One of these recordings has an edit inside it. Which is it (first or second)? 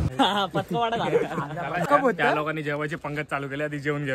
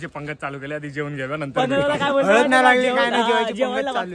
first